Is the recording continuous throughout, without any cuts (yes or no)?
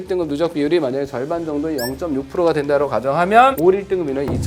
no